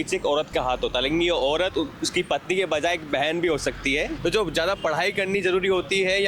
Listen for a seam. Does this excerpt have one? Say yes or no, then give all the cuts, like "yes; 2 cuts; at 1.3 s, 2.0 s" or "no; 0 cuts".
yes; 1 cut; at 4.1 s